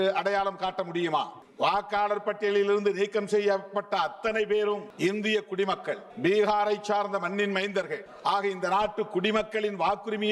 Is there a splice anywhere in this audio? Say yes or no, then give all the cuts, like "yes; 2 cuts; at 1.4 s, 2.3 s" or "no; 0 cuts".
yes; 4 cuts; at 1.4 s, 4.9 s, 6.1 s, 8.0 s